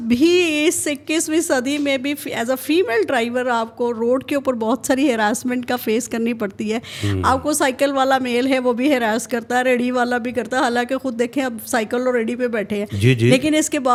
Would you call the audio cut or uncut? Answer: uncut